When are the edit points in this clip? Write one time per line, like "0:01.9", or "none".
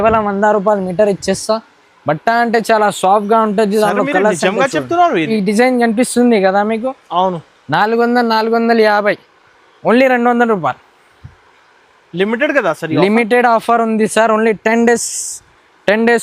0:05.3